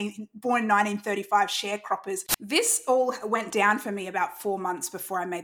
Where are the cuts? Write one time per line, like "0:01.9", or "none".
0:02.3